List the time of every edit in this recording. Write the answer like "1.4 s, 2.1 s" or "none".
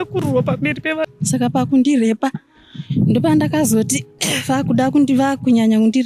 1.1 s